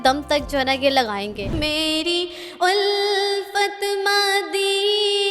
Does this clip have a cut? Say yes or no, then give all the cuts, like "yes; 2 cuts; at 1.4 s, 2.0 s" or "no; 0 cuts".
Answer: yes; 1 cut; at 1.6 s